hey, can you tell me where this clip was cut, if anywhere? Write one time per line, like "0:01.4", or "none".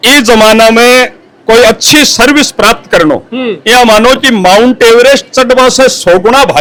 none